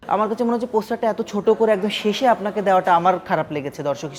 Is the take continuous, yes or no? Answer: yes